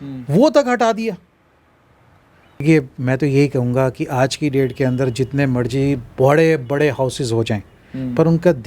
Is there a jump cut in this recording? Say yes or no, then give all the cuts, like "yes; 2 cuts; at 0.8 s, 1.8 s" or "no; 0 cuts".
yes; 1 cut; at 2.6 s